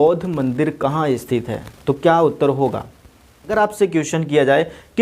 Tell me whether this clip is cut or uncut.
cut